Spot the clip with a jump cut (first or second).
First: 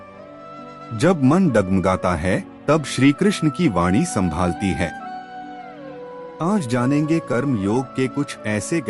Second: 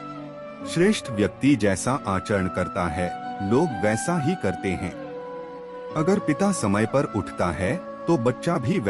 first